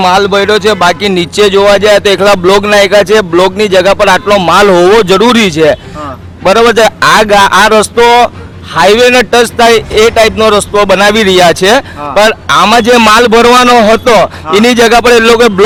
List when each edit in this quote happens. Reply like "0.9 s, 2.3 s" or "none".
none